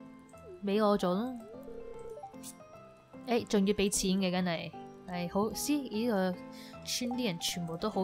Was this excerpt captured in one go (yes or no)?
yes